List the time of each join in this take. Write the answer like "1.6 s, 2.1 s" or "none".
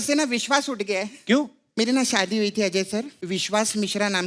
1.6 s, 3.2 s